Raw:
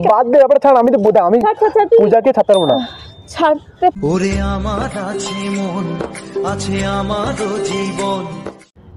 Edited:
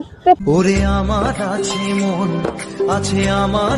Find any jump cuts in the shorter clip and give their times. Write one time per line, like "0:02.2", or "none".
none